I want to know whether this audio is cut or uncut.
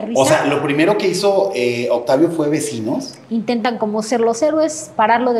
cut